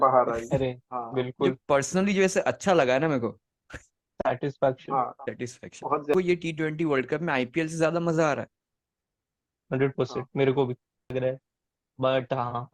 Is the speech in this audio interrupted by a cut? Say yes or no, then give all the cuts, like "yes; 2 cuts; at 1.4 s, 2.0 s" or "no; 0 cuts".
yes; 2 cuts; at 6.1 s, 11.1 s